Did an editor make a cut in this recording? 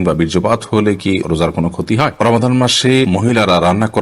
yes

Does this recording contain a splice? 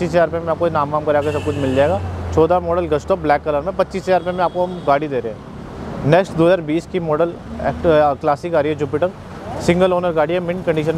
no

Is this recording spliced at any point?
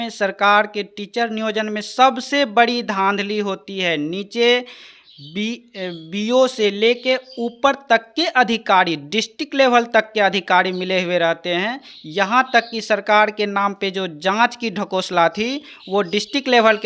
no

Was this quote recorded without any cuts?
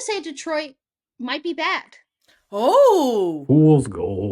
no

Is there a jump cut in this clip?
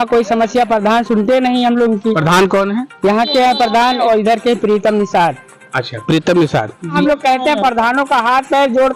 no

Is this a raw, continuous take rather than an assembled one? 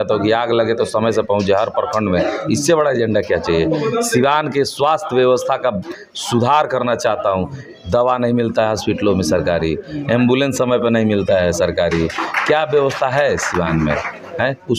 yes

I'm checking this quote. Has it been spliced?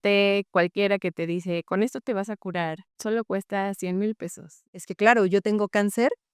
yes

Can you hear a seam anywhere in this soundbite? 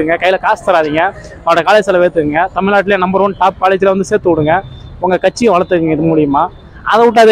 no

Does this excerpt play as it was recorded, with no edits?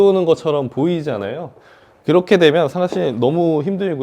yes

